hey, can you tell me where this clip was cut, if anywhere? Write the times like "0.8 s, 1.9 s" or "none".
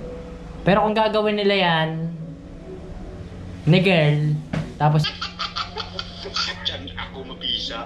5.0 s